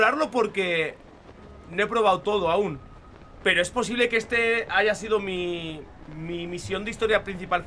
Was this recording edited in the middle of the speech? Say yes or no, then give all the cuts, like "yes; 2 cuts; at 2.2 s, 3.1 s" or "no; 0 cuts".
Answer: no; 0 cuts